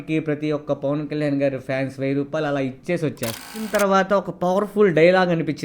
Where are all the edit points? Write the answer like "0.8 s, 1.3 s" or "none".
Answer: 3.6 s